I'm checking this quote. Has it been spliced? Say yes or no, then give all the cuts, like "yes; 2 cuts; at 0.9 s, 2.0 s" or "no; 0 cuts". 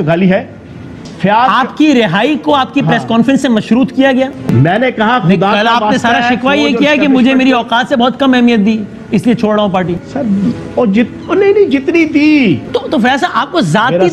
yes; 3 cuts; at 1.1 s, 4.5 s, 12.7 s